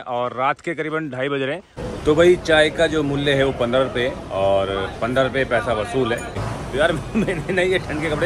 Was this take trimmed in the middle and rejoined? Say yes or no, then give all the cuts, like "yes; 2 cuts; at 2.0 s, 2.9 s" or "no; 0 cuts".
yes; 2 cuts; at 1.7 s, 6.4 s